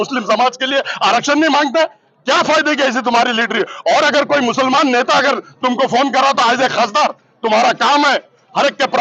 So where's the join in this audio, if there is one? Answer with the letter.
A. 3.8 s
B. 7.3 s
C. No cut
C